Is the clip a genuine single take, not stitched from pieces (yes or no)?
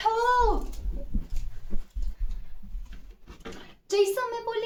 yes